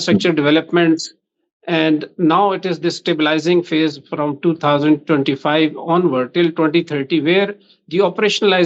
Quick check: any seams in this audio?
no; 0 cuts

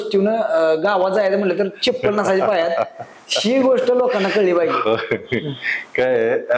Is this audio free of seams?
yes; 0 cuts

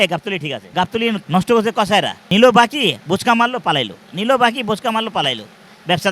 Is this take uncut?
no; 2 cuts; at 1.1 s, 2.2 s

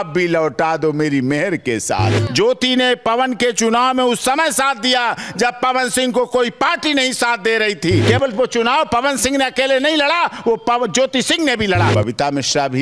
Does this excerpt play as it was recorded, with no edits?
no; 3 cuts; at 2.2 s, 8.0 s, 11.9 s

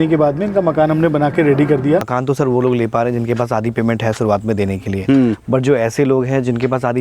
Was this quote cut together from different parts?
yes; 1 cut; at 2.1 s

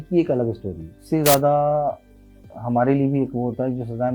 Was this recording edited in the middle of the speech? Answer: yes; 1 cut; at 0.9 s

